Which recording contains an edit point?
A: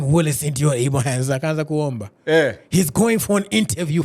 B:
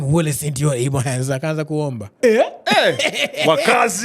B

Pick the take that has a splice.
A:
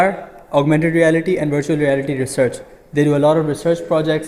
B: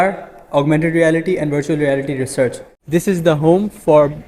B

